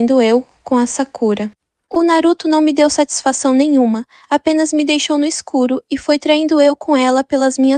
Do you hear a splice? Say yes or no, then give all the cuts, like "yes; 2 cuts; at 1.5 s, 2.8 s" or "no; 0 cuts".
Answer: no; 0 cuts